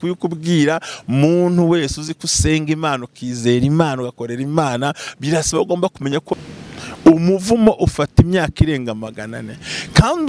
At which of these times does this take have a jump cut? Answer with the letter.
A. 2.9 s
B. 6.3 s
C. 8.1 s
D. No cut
B